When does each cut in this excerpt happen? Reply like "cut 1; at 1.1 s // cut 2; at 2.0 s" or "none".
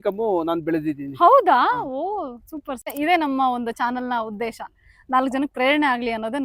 cut 1; at 2.9 s

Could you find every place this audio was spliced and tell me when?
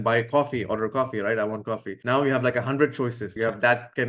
cut 1; at 1.9 s // cut 2; at 3.4 s

